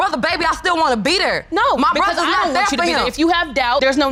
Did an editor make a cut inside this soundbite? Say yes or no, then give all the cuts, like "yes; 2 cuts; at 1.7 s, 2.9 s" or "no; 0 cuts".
no; 0 cuts